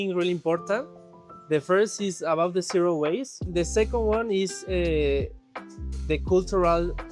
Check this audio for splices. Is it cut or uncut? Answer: uncut